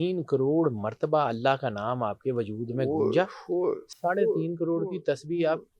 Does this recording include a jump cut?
no; 0 cuts

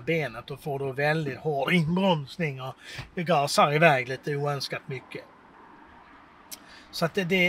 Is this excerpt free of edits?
yes; 0 cuts

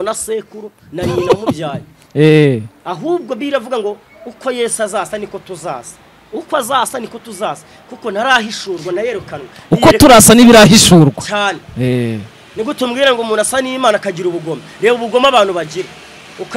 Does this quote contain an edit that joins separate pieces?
no; 0 cuts

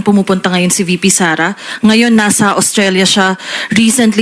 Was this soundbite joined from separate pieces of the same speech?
no; 0 cuts

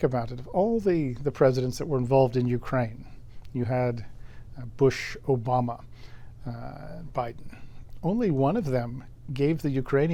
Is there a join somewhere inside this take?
no; 0 cuts

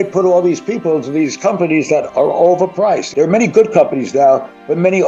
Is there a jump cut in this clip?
no; 0 cuts

